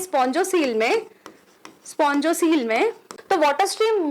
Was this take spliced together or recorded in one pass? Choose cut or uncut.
cut